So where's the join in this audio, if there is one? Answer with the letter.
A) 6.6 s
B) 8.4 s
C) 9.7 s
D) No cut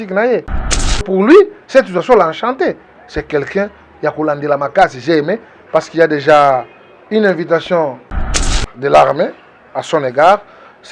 B